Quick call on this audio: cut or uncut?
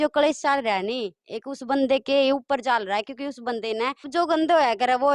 cut